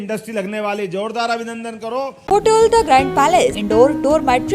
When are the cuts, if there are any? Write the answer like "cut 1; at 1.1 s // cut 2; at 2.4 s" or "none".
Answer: cut 1; at 2.1 s // cut 2; at 3.6 s